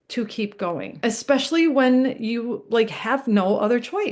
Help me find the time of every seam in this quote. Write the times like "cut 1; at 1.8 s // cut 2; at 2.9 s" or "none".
none